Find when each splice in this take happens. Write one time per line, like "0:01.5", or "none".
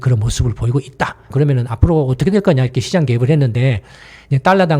0:01.2